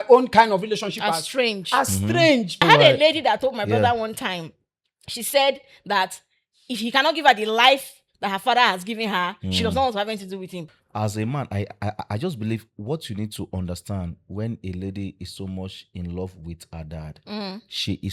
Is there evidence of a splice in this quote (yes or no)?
yes